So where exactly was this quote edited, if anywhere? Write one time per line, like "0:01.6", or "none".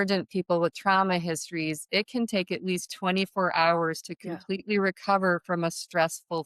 none